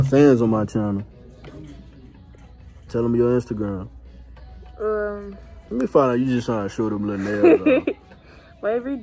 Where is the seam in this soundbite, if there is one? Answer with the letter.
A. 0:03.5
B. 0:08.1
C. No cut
B